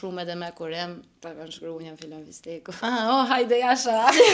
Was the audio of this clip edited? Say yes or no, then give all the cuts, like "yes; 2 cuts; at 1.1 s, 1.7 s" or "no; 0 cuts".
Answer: yes; 2 cuts; at 1.1 s, 2.8 s